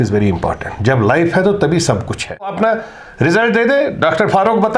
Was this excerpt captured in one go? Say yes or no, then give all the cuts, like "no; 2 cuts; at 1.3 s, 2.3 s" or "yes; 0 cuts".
no; 1 cut; at 2.5 s